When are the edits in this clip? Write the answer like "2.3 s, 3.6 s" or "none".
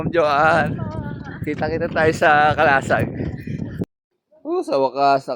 3.8 s